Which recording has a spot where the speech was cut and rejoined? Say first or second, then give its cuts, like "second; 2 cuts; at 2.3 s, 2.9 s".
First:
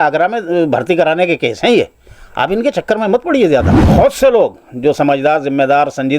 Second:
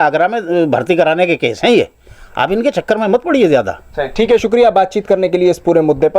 first; 1 cut; at 3.8 s